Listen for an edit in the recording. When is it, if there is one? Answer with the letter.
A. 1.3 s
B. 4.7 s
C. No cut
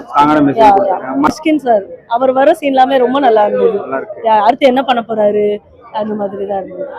A